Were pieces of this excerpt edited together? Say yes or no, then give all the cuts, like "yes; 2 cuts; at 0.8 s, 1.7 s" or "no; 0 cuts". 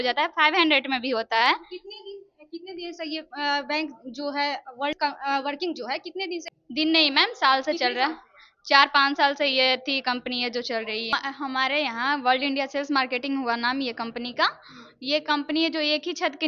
yes; 3 cuts; at 5.0 s, 6.5 s, 11.2 s